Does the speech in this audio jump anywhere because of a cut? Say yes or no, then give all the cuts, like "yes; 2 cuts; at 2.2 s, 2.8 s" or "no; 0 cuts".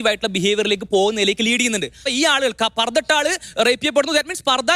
yes; 1 cut; at 2.1 s